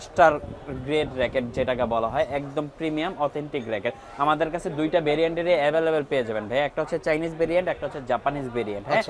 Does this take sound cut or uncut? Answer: uncut